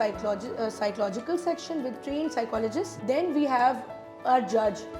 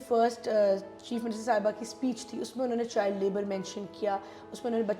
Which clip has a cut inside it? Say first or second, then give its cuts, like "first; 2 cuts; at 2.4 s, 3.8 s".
first; 1 cut; at 2.9 s